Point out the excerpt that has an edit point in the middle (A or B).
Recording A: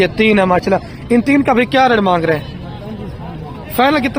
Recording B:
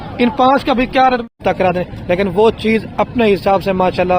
B